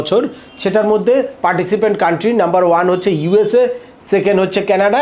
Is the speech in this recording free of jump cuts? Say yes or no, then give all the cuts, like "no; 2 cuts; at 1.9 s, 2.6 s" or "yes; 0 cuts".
yes; 0 cuts